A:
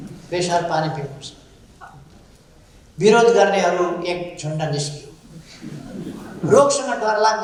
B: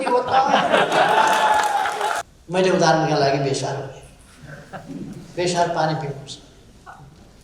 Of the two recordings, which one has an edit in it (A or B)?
B